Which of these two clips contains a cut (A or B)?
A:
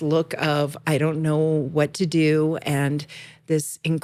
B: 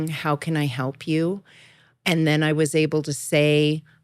B